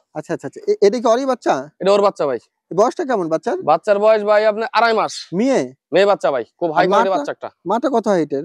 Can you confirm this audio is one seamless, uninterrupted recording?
yes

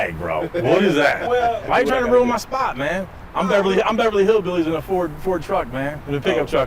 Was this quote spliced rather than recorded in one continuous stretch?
yes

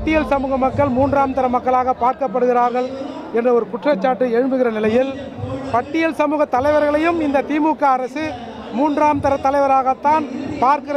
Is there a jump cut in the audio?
no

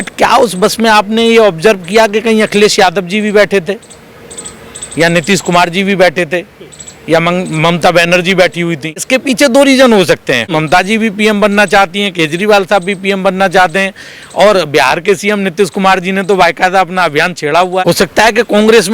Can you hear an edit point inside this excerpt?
yes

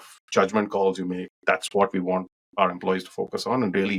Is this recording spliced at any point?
no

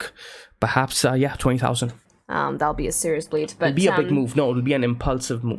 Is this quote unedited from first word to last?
no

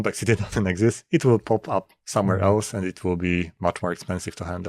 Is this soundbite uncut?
yes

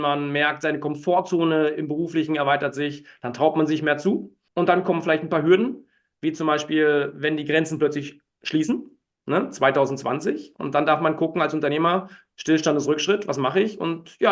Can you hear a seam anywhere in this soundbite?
no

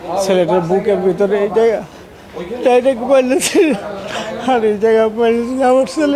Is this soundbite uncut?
yes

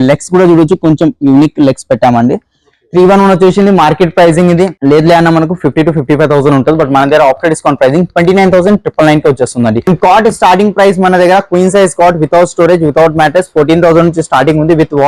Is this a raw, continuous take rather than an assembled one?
no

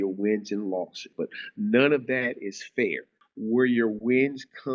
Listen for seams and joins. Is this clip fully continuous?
no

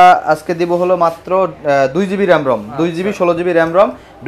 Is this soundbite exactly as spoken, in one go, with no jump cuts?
yes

